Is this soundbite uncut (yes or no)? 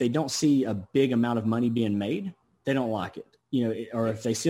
no